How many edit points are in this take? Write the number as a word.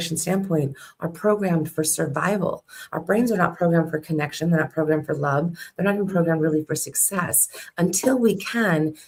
zero